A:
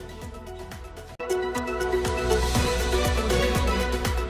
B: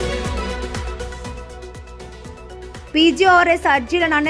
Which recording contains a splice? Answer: B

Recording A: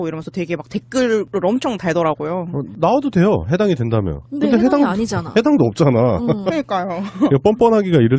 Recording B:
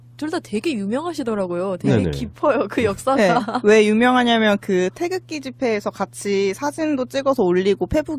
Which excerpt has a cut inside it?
A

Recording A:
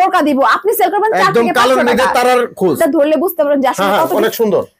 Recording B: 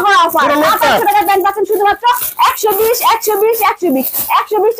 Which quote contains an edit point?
A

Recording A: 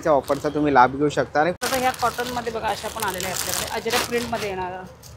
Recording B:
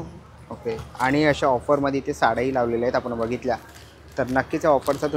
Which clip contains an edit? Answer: A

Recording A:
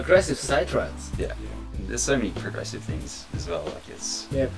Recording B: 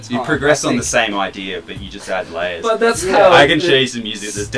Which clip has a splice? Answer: A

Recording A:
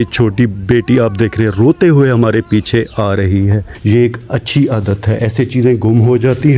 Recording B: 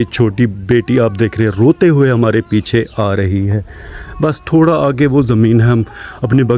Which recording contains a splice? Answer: A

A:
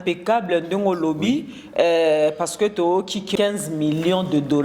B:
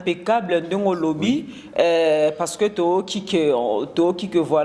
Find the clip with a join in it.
A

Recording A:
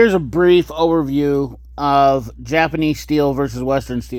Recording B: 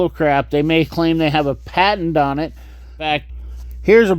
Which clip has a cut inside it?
B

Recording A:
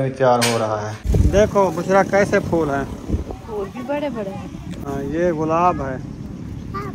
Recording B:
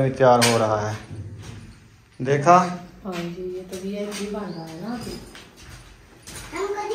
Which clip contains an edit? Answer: A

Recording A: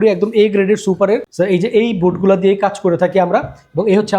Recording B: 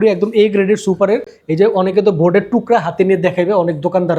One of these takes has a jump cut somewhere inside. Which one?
A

